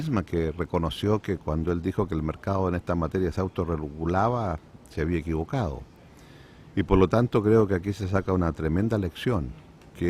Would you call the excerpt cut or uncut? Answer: cut